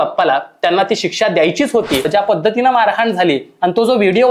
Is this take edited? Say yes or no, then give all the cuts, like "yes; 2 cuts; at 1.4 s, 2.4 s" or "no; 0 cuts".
yes; 1 cut; at 2.1 s